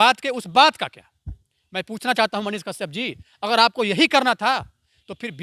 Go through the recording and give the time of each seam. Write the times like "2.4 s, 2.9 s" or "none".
none